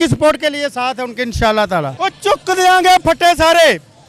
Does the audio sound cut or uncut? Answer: cut